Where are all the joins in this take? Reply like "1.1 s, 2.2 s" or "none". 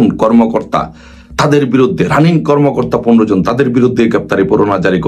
none

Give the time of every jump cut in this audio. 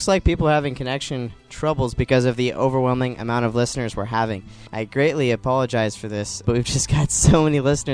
4.6 s, 6.4 s

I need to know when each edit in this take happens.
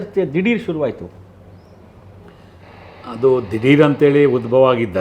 none

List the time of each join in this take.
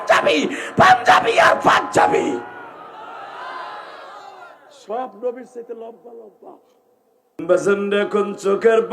7.4 s

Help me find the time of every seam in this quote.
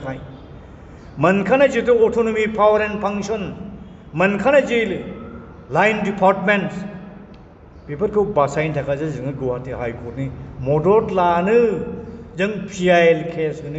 none

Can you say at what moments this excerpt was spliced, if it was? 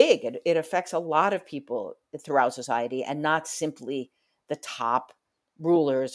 none

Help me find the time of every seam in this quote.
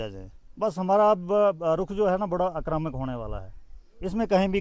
none

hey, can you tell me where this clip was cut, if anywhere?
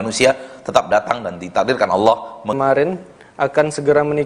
2.6 s

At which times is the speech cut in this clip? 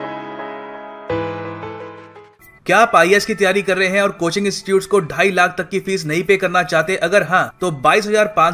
2.0 s

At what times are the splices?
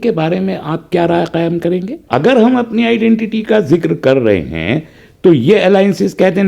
2.0 s

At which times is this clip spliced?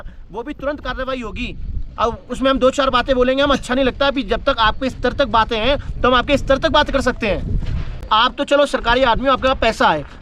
7.9 s

